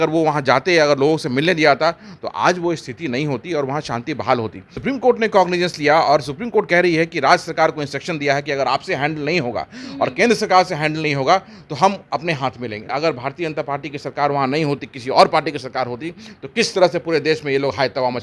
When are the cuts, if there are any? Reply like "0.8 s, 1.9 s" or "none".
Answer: 4.7 s, 12.8 s